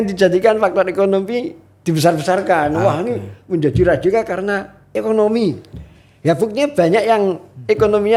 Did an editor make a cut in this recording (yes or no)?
no